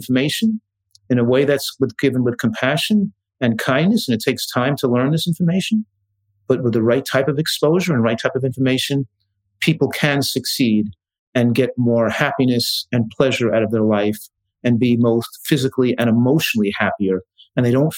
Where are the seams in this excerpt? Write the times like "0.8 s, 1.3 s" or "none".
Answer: none